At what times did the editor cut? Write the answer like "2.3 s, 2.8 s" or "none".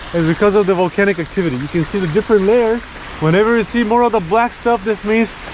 none